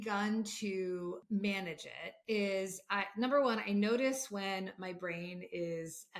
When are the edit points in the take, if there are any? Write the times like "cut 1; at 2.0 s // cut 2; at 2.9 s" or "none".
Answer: cut 1; at 1.2 s